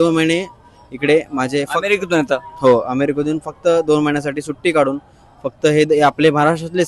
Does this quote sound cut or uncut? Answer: uncut